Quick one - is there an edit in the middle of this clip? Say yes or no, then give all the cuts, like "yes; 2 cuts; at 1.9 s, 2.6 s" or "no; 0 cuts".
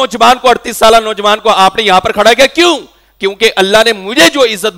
no; 0 cuts